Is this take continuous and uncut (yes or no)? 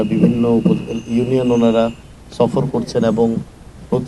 yes